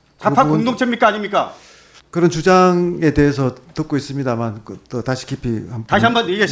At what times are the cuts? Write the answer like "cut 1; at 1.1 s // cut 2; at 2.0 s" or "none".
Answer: none

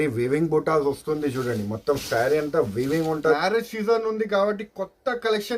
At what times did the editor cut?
cut 1; at 3.2 s

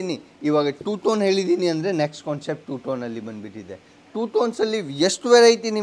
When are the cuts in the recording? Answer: none

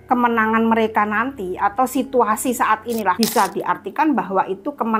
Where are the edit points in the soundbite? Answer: cut 1; at 3.2 s

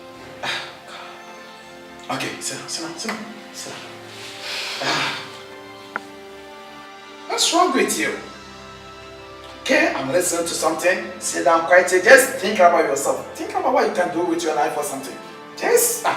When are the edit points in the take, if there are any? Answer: cut 1; at 10.8 s

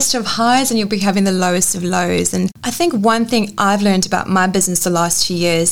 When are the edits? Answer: cut 1; at 2.6 s

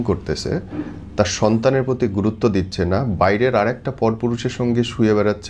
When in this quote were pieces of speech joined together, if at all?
none

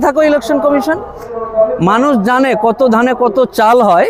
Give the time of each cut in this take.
cut 1; at 1.2 s

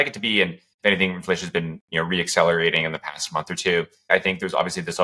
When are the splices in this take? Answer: cut 1; at 4.1 s

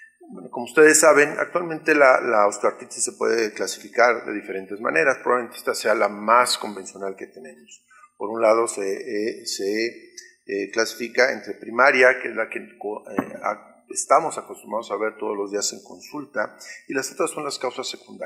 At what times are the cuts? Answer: cut 1; at 10.0 s

